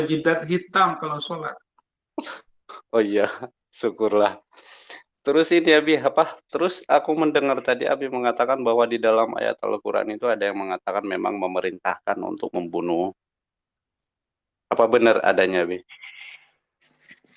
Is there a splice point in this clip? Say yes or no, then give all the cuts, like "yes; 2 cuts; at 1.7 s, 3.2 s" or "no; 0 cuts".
no; 0 cuts